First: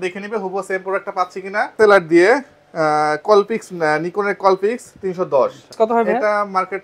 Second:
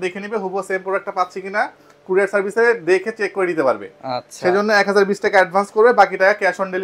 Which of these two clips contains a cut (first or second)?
first